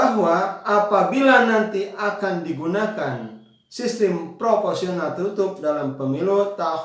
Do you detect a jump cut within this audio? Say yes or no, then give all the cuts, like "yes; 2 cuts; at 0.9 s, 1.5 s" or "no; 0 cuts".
no; 0 cuts